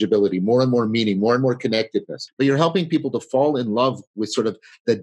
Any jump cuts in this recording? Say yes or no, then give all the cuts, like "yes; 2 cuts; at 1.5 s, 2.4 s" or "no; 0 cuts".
yes; 1 cut; at 2.2 s